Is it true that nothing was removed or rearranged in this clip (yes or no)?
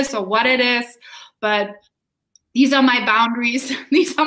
yes